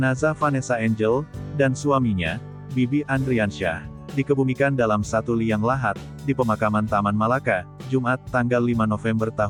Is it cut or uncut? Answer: uncut